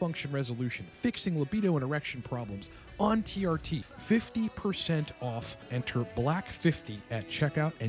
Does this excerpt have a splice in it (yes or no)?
yes